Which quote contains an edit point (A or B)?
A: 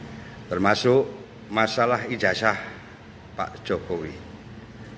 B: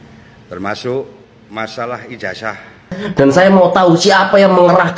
B